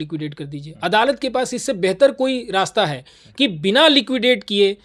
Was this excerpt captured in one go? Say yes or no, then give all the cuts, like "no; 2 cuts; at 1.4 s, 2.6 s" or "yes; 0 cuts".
yes; 0 cuts